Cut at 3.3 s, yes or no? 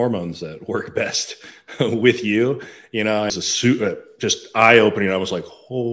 yes